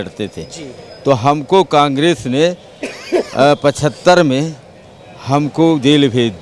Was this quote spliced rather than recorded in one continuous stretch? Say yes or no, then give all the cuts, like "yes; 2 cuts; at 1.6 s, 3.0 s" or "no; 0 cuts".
no; 0 cuts